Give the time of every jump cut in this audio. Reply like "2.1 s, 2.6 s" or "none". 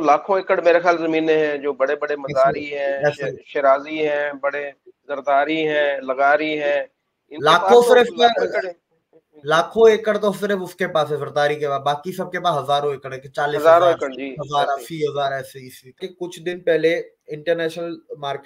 16.1 s